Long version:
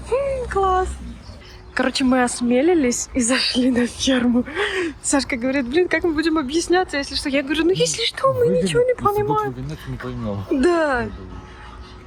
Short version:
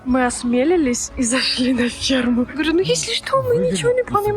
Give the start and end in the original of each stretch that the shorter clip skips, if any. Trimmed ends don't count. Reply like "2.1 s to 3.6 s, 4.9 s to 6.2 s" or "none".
4.5 s to 7.4 s